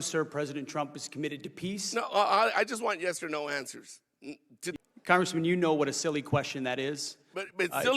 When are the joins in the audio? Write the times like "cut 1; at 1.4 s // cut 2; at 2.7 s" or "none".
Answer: cut 1; at 4.7 s

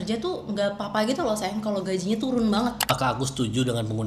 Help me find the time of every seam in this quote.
cut 1; at 2.9 s

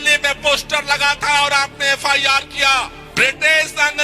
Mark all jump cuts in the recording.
cut 1; at 3.0 s

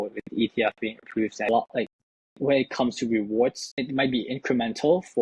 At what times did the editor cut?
cut 1; at 1.5 s // cut 2; at 3.7 s

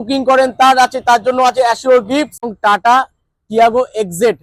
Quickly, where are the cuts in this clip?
cut 1; at 2.4 s

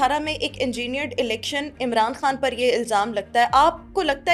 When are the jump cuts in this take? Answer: none

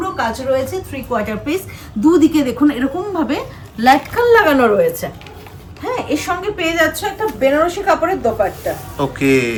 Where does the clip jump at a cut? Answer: none

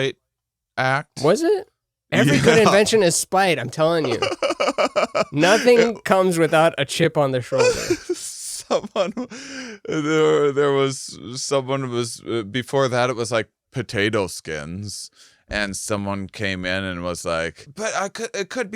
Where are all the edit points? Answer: cut 1; at 7.0 s // cut 2; at 17.7 s

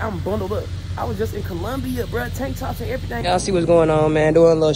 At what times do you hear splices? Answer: cut 1; at 3.2 s

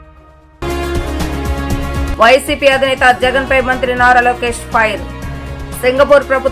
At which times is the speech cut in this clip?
cut 1; at 2.1 s

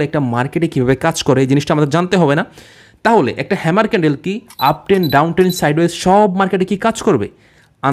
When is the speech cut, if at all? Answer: none

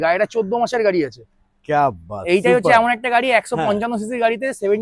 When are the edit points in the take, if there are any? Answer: none

